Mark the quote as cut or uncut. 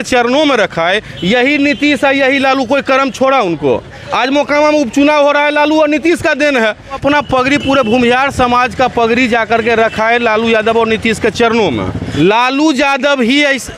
cut